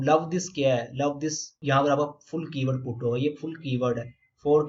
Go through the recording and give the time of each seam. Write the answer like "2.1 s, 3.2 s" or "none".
1.6 s